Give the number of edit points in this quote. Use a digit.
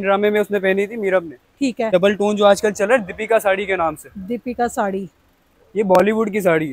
1